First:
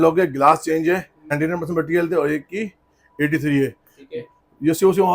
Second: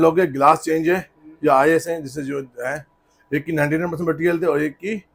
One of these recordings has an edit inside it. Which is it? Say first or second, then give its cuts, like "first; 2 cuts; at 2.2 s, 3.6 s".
first; 1 cut; at 1.3 s